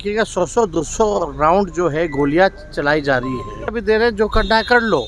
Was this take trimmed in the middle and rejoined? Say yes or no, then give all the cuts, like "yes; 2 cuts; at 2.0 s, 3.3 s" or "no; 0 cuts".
yes; 1 cut; at 3.7 s